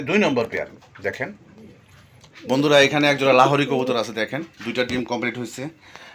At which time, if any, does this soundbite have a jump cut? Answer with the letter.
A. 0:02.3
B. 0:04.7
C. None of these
A